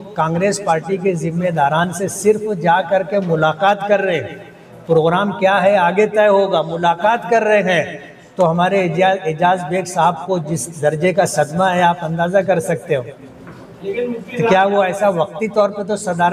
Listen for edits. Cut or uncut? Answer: uncut